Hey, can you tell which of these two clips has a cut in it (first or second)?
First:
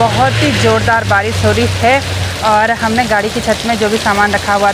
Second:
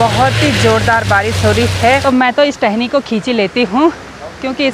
second